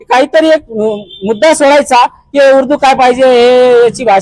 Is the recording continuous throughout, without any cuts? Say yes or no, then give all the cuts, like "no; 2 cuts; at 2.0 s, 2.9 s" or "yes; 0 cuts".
yes; 0 cuts